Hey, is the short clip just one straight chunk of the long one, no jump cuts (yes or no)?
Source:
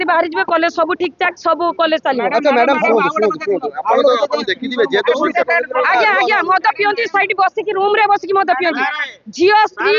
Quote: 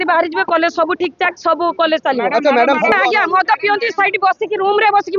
no